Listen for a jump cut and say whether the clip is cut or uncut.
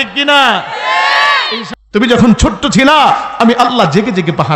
cut